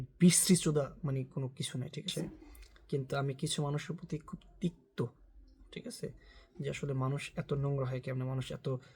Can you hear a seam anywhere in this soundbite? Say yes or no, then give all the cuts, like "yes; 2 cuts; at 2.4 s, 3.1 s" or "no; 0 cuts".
yes; 1 cut; at 2.1 s